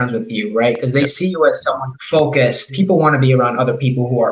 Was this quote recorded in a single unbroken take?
no; 2 cuts; at 1.9 s, 2.7 s

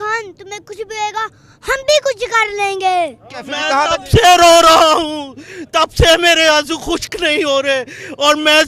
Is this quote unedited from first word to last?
no; 1 cut; at 3.3 s

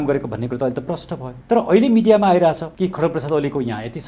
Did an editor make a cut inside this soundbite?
yes; 2 cuts; at 1.3 s, 2.7 s

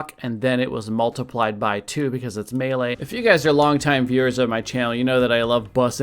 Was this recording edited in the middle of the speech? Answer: yes; 1 cut; at 3.0 s

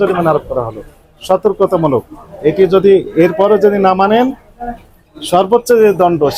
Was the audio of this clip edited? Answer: no; 0 cuts

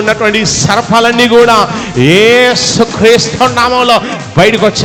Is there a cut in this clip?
no; 0 cuts

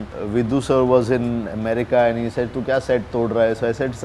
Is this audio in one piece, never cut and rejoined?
yes; 0 cuts

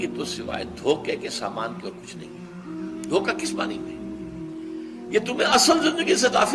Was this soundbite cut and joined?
no; 0 cuts

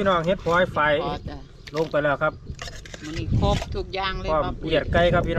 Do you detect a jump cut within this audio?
no; 0 cuts

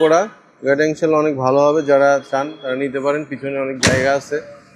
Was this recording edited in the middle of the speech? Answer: no; 0 cuts

